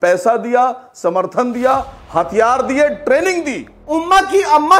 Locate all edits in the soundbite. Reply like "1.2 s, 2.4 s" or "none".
3.8 s